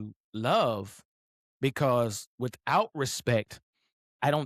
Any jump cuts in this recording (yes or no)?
no